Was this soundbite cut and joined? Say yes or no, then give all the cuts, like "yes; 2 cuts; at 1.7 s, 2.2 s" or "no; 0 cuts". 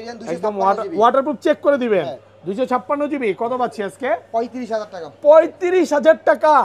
no; 0 cuts